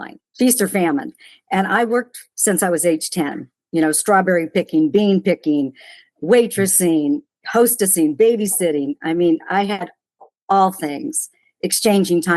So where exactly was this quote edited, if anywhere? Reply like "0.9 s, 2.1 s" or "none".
none